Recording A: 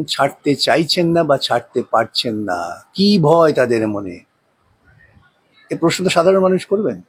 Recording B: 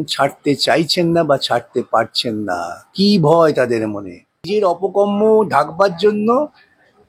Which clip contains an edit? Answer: B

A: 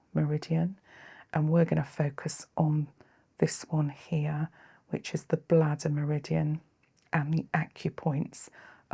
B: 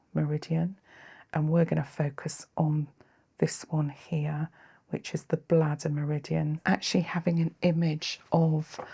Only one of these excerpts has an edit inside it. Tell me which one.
B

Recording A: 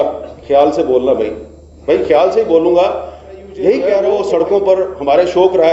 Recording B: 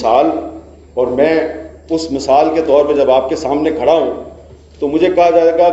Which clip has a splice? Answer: A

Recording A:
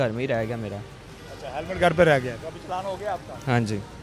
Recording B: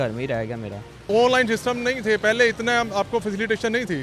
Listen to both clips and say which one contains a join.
B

